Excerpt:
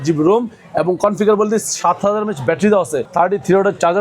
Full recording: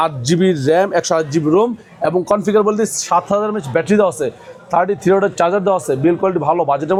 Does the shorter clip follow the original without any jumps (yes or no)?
no